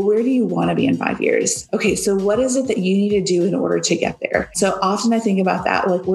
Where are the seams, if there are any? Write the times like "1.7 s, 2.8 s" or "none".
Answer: 1.6 s, 4.6 s